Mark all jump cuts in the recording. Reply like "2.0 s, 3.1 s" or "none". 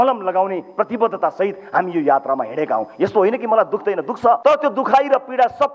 4.4 s